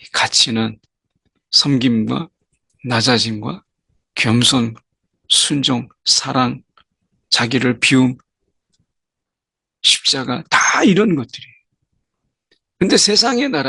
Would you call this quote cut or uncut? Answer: uncut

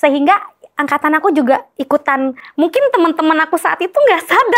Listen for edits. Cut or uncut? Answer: cut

